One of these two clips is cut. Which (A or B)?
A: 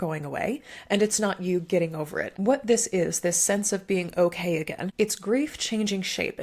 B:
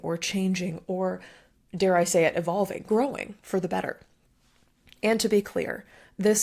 A